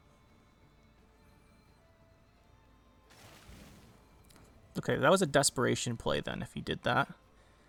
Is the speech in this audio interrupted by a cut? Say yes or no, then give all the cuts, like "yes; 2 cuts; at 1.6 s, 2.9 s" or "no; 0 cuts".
no; 0 cuts